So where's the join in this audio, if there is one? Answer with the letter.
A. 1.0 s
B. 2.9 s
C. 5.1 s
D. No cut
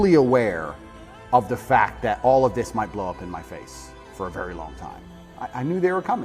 C